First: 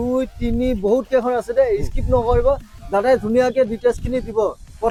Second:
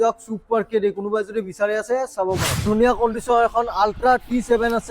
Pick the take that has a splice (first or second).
second